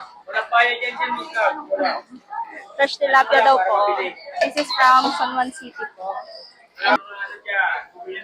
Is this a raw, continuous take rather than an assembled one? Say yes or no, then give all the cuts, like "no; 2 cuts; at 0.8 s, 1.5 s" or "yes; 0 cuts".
no; 1 cut; at 7.0 s